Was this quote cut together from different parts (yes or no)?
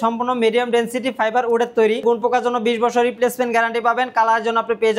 yes